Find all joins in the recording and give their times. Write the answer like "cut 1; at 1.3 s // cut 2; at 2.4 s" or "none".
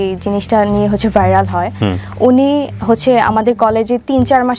none

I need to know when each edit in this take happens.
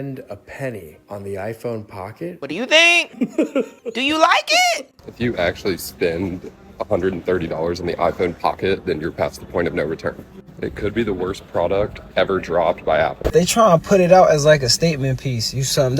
cut 1; at 2.4 s // cut 2; at 3.8 s // cut 3; at 5.0 s // cut 4; at 13.2 s

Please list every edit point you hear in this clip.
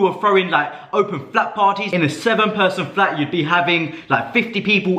cut 1; at 1.8 s

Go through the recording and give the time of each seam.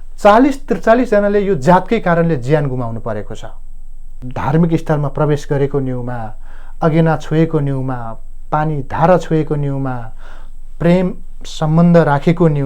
cut 1; at 4.2 s

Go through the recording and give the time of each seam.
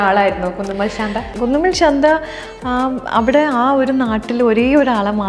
cut 1; at 1.3 s

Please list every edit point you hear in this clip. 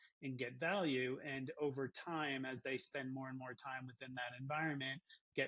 none

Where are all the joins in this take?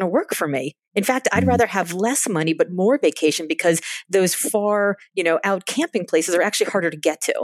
none

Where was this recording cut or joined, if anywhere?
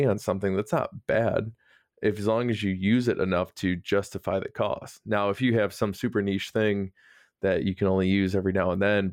none

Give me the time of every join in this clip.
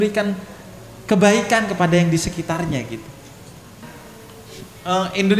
cut 1; at 3.8 s

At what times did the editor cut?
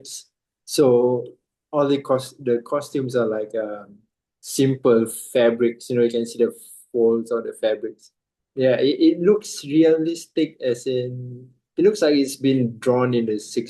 none

